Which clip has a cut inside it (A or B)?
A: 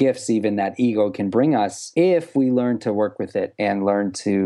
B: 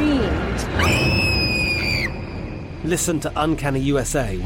A